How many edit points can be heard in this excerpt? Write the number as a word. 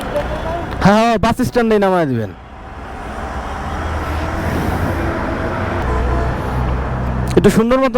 one